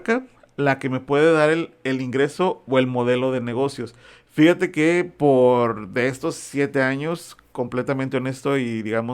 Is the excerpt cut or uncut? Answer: uncut